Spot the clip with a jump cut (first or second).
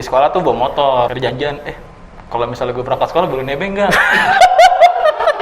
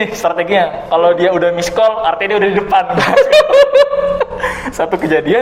first